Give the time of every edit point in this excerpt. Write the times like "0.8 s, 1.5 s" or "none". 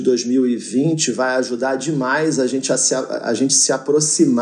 none